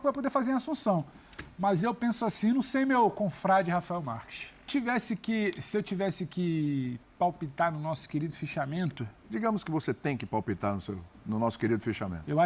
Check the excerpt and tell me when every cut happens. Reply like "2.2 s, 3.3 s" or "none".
4.7 s